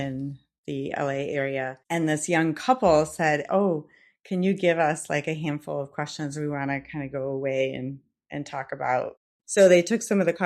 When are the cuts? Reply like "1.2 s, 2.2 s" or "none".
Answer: 1.8 s, 9.2 s